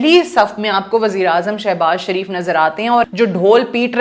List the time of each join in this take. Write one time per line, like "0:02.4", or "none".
0:03.1

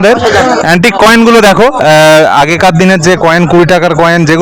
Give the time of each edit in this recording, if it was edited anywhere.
none

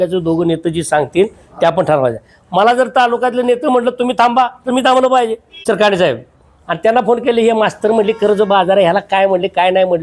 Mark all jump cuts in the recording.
0:05.5

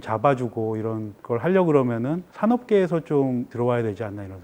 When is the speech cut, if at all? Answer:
0:01.1
0:02.2
0:03.5

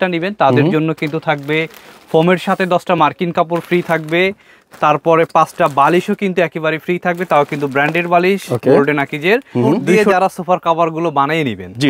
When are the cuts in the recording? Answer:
0:10.0

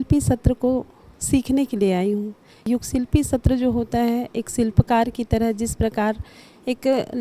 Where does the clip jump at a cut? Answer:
0:02.7

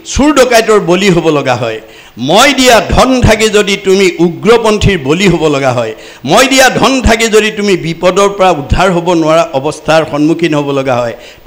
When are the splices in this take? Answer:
none

